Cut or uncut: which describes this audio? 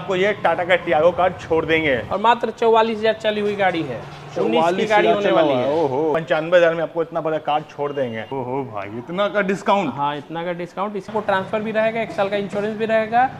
cut